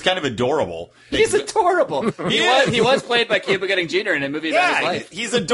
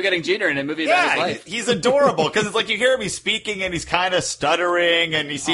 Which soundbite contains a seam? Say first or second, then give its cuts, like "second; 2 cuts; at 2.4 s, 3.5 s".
first; 1 cut; at 1.0 s